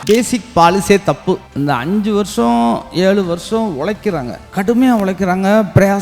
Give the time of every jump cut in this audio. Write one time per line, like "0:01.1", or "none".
0:01.5
0:04.4